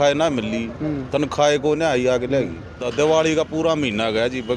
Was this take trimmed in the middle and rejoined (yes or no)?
yes